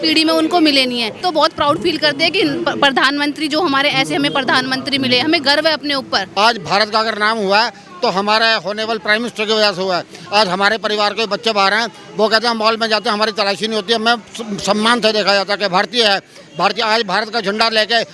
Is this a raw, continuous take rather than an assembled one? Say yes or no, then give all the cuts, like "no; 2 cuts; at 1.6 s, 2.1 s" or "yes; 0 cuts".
no; 2 cuts; at 1.2 s, 6.3 s